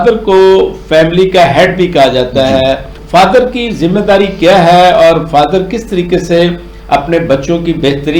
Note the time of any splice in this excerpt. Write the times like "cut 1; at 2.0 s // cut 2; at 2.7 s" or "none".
cut 1; at 3.0 s